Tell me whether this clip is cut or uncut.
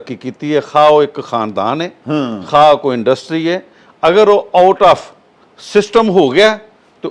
uncut